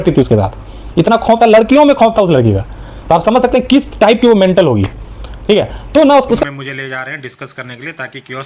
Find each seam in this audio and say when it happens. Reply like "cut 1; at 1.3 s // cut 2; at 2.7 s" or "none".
cut 1; at 6.4 s